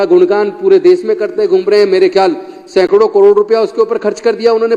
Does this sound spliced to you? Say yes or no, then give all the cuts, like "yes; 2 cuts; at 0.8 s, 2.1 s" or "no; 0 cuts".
no; 0 cuts